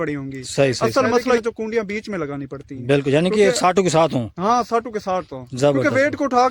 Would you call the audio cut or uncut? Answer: cut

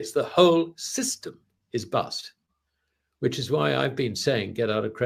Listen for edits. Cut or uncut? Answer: uncut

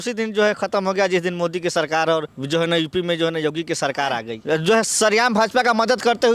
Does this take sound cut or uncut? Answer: cut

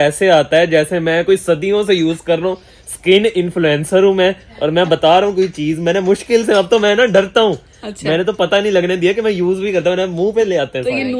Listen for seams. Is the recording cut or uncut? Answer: uncut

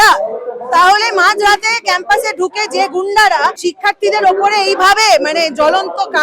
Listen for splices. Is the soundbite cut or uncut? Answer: cut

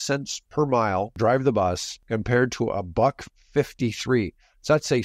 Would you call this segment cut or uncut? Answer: cut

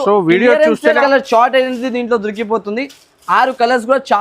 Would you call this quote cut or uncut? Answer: cut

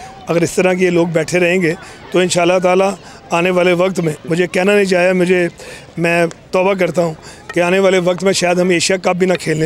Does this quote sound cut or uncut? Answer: uncut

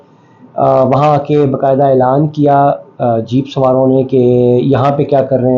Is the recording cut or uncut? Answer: uncut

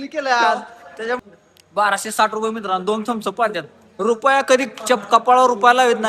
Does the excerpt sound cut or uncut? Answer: cut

